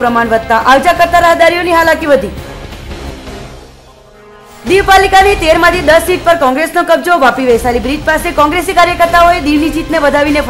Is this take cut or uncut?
uncut